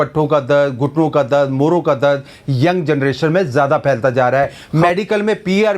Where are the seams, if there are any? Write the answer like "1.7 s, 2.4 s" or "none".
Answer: 4.6 s